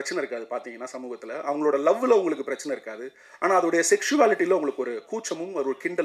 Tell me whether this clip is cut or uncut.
uncut